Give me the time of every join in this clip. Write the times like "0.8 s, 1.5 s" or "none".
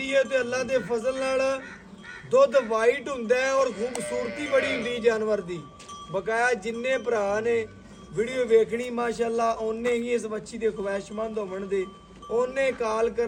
none